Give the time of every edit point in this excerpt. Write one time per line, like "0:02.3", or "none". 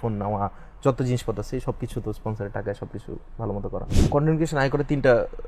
0:03.9